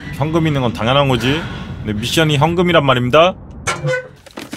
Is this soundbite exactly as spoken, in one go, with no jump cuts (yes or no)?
yes